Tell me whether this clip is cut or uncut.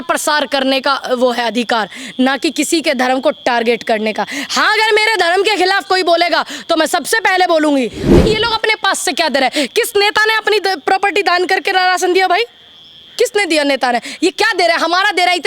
cut